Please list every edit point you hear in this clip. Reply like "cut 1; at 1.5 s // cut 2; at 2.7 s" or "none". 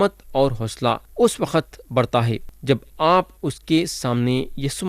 cut 1; at 1.1 s // cut 2; at 2.4 s